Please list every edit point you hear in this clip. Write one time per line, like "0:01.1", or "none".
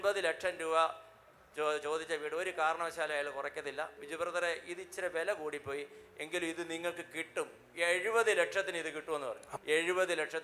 0:04.0
0:09.5